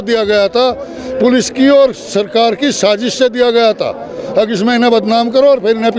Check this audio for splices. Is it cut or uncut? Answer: uncut